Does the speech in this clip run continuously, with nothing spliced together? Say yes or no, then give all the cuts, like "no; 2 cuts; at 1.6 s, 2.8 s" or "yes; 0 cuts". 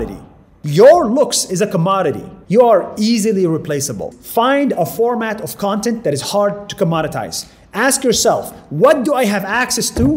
no; 2 cuts; at 2.3 s, 4.1 s